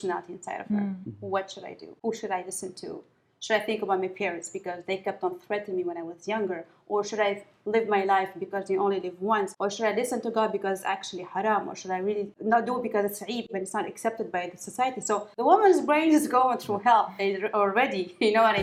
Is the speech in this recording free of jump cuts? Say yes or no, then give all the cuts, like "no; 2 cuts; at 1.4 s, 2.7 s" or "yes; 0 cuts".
yes; 0 cuts